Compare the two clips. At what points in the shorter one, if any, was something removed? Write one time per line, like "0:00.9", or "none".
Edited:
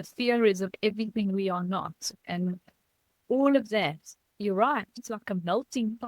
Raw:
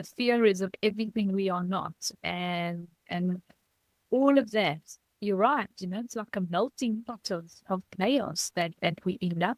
0:02.1
0:05.0